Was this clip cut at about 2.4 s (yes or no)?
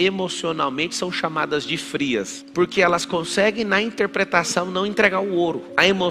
yes